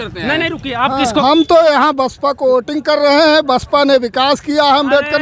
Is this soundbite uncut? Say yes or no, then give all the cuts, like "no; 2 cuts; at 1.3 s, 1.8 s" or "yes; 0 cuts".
no; 1 cut; at 1.2 s